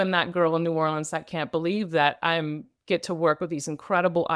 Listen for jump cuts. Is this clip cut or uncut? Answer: uncut